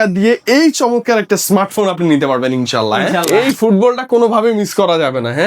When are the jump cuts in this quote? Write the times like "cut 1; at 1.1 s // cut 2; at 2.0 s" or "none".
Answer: cut 1; at 3.2 s